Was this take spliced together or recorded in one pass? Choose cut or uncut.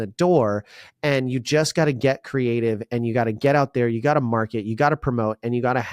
uncut